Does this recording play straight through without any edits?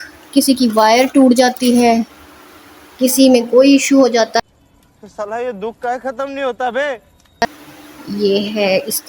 no; 1 cut; at 7.5 s

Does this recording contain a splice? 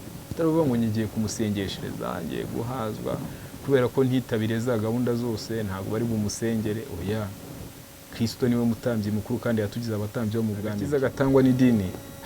yes; 1 cut; at 10.9 s

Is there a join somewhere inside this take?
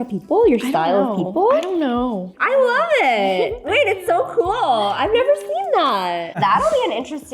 yes; 2 cuts; at 2.3 s, 6.4 s

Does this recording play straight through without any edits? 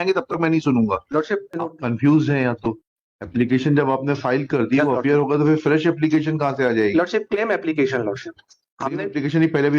no; 1 cut; at 1.6 s

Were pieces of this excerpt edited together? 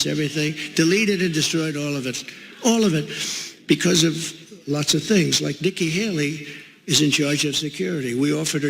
yes; 1 cut; at 5.4 s

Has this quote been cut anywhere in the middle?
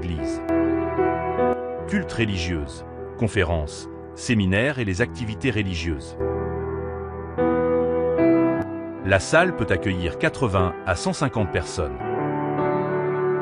no; 0 cuts

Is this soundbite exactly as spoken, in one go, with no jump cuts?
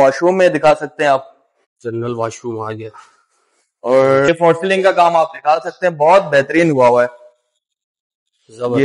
no; 1 cut; at 4.3 s

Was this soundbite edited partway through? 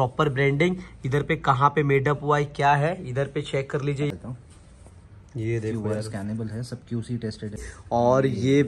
yes; 2 cuts; at 4.1 s, 7.7 s

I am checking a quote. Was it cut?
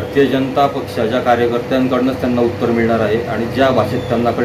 no; 0 cuts

